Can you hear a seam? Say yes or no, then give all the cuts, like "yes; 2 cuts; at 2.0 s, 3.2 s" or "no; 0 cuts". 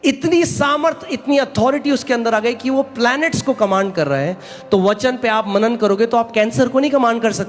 no; 0 cuts